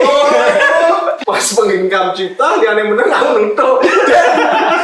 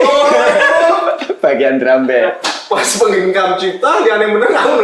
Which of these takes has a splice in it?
first; 1 cut; at 1.2 s

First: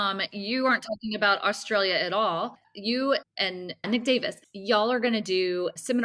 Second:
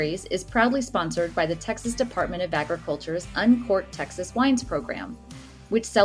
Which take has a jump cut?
first; 2 cuts; at 2.6 s, 3.8 s

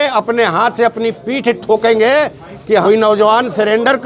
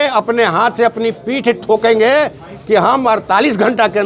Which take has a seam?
first; 1 cut; at 2.8 s

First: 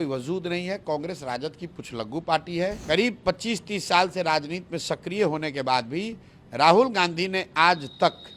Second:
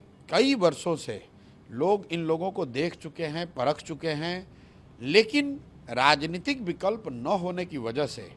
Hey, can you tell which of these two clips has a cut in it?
first; 1 cut; at 2.8 s

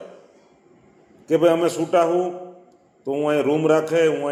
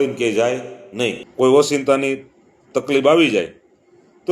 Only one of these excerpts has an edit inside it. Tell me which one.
second; 1 cut; at 1.2 s

